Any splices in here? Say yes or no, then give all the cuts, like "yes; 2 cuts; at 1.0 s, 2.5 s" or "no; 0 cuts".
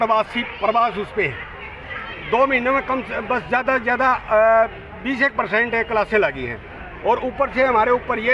no; 0 cuts